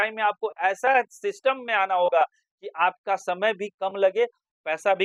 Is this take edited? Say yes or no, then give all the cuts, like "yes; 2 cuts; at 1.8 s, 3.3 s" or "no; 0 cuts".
no; 0 cuts